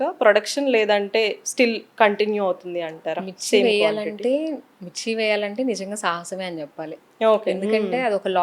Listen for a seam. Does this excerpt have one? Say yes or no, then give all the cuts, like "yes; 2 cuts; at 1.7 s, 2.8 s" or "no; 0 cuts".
no; 0 cuts